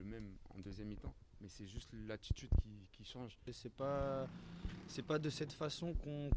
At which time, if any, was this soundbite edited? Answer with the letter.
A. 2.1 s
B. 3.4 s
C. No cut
B